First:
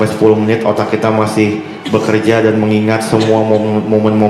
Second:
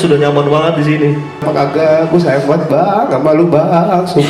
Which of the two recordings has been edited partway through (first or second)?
second